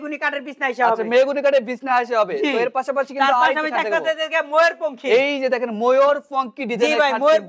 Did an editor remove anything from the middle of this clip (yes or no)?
no